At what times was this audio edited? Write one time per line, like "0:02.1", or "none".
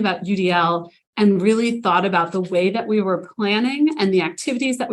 0:01.0